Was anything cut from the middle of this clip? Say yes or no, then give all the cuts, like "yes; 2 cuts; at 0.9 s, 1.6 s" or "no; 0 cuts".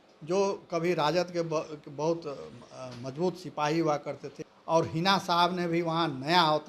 yes; 1 cut; at 4.2 s